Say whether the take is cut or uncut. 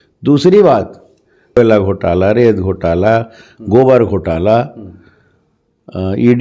cut